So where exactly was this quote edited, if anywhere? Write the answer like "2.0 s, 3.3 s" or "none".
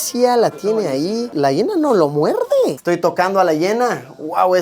1.3 s, 2.8 s